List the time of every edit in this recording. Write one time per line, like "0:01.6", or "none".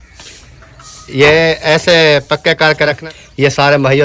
0:03.1